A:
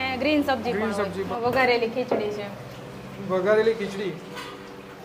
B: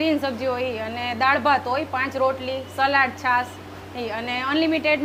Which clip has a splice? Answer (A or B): A